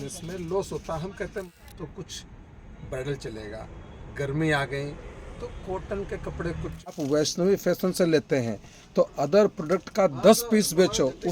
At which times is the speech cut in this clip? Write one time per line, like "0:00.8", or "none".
0:01.4
0:07.0